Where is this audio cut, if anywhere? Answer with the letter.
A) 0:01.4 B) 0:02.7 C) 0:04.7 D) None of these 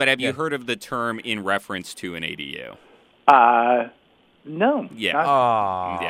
D